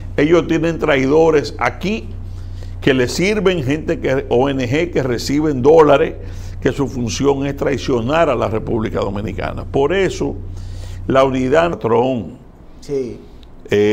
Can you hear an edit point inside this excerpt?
yes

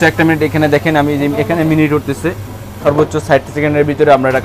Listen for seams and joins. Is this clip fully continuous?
yes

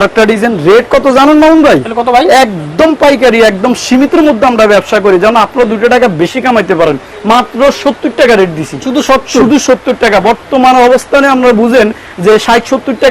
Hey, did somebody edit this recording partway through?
no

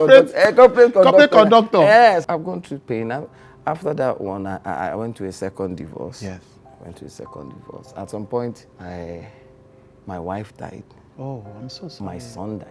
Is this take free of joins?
no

